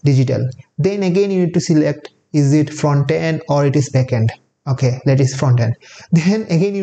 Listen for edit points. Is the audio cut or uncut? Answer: uncut